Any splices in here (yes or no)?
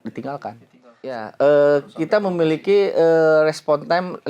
yes